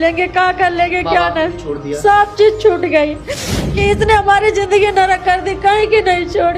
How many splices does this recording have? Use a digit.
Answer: 1